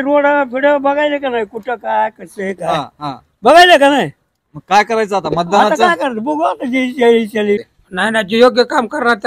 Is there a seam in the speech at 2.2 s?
no; 1 cut; at 7.6 s

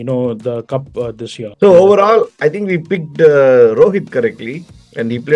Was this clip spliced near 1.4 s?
yes; 1 cut; at 1.4 s

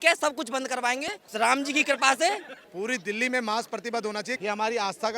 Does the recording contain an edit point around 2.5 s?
yes; 1 cut; at 2.5 s

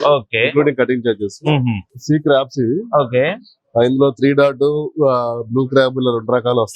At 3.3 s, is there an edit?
no; 1 cut; at 1.9 s

